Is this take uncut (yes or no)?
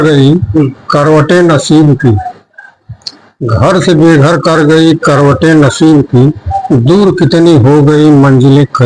yes